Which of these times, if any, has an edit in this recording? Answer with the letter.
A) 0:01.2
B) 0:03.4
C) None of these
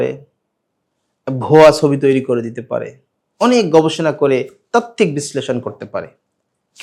C